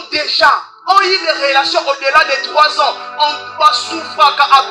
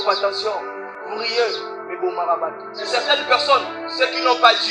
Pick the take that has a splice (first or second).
second